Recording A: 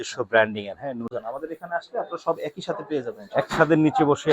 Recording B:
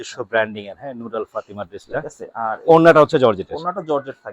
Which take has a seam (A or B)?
A